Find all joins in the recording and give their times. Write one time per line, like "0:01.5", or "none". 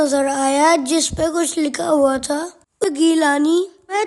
0:02.8